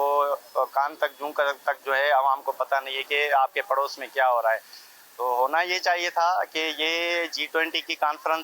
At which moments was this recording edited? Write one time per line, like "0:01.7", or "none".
none